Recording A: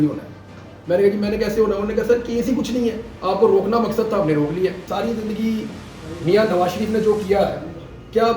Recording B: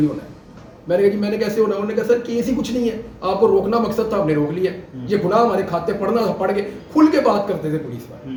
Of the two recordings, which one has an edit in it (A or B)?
A